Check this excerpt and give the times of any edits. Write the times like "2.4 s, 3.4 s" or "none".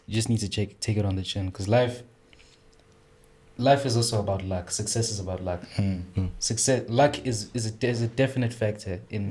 none